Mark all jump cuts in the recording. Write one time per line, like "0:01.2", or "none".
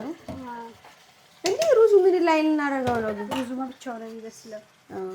none

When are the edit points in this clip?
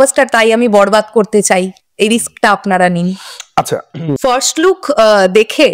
0:04.1

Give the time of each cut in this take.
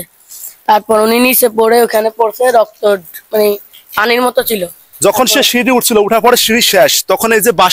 0:04.8

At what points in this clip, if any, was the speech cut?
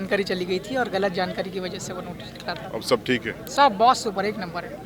none

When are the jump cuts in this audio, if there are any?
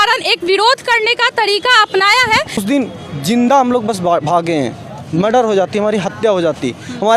0:02.6

